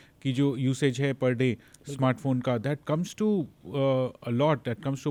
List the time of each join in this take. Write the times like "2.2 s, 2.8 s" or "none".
none